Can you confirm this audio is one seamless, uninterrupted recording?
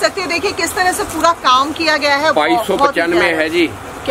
yes; 0 cuts

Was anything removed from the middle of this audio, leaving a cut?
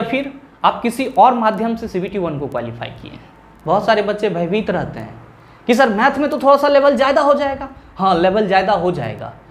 yes; 1 cut; at 3.5 s

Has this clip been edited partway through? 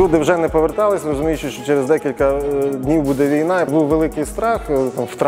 yes; 1 cut; at 3.7 s

